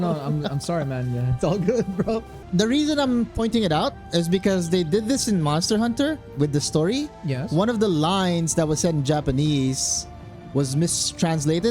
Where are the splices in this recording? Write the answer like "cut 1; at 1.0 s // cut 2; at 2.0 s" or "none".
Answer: cut 1; at 2.4 s